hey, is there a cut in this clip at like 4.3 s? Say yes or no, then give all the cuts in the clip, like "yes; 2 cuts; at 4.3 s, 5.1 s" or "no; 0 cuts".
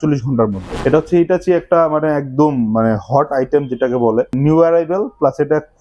yes; 2 cuts; at 0.8 s, 4.3 s